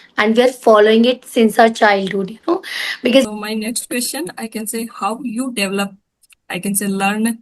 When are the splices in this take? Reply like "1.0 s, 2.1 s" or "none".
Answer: 3.2 s